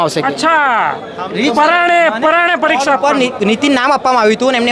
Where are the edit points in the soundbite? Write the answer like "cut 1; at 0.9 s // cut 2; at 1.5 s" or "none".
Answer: none